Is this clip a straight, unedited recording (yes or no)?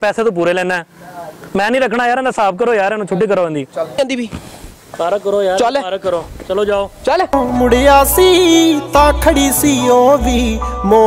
no